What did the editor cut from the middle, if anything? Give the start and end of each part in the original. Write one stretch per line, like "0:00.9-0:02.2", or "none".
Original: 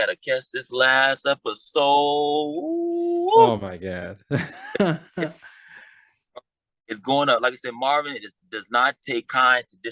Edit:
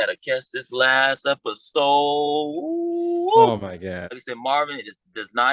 0:04.2-0:07.6